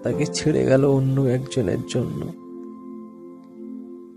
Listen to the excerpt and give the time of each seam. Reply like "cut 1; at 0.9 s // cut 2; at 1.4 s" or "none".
none